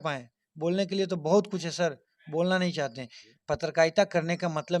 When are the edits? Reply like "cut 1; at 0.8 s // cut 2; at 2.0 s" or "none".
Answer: cut 1; at 3.2 s